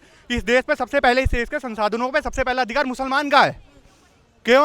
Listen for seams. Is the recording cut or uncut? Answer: uncut